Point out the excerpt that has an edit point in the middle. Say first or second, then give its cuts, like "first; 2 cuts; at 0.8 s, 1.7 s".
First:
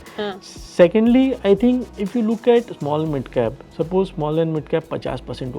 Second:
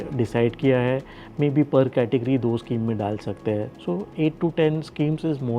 first; 1 cut; at 2.0 s